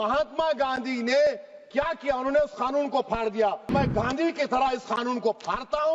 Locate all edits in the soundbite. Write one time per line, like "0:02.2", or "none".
0:03.7